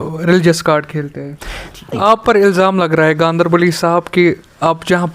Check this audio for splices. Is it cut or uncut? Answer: cut